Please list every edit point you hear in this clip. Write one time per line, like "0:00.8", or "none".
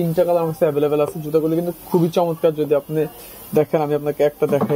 none

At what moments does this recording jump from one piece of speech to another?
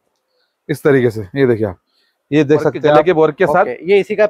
0:03.0

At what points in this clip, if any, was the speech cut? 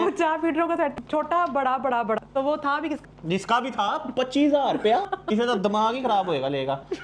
none

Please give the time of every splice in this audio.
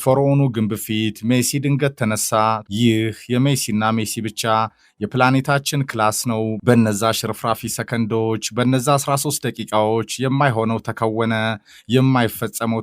0:02.6

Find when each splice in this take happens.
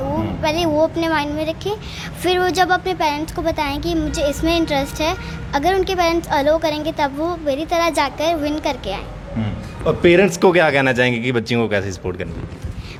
none

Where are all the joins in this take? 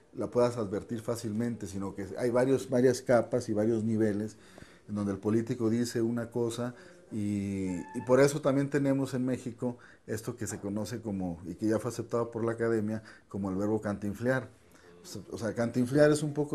none

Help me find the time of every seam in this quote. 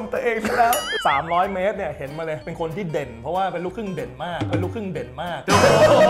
0:00.9

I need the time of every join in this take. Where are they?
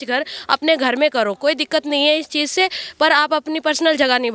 none

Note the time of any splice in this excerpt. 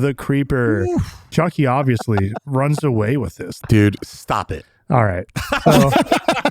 0:01.3
0:03.5

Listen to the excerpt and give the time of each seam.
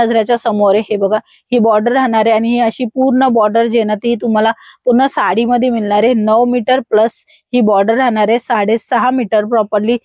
none

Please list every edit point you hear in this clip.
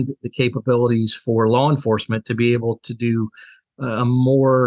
none

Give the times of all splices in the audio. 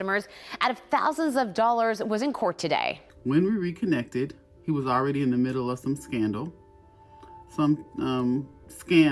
0:03.0

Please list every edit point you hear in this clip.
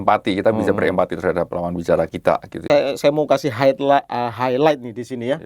0:02.7

